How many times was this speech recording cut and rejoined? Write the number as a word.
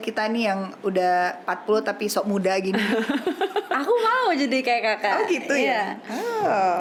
zero